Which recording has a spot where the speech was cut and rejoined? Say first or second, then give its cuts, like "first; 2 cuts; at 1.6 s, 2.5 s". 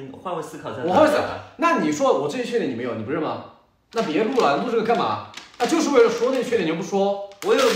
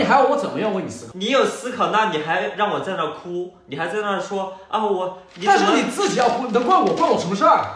second; 1 cut; at 1.0 s